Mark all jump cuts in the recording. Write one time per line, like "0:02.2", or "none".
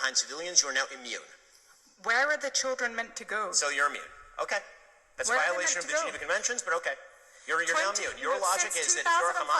none